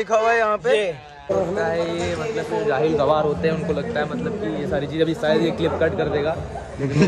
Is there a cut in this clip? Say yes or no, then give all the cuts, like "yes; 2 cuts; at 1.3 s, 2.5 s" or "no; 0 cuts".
yes; 1 cut; at 1.3 s